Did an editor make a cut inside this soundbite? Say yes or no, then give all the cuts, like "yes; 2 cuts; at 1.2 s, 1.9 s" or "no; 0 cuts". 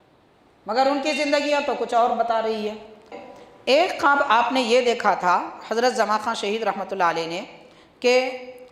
yes; 1 cut; at 3.1 s